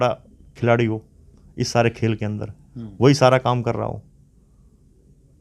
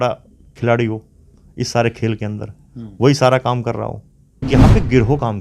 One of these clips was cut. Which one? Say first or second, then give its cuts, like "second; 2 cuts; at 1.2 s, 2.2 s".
second; 1 cut; at 4.4 s